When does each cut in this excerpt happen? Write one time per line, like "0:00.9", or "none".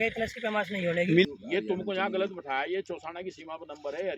0:01.2